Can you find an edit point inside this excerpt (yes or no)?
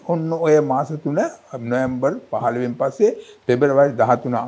no